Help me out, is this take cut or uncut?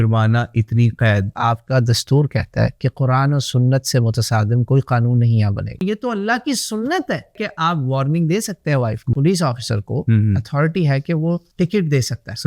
cut